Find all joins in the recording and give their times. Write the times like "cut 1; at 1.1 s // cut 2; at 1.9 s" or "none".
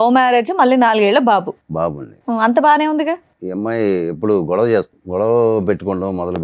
cut 1; at 3.4 s // cut 2; at 5.0 s